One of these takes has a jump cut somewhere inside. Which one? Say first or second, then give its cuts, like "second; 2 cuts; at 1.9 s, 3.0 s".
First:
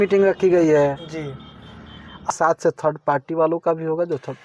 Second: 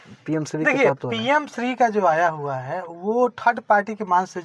first; 1 cut; at 2.3 s